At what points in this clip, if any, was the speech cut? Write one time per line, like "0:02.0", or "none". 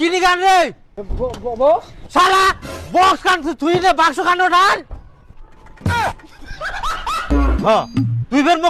0:07.3